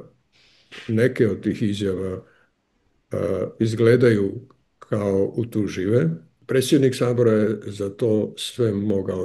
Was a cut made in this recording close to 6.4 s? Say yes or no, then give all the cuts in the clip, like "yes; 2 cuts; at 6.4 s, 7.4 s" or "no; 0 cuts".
yes; 1 cut; at 6.4 s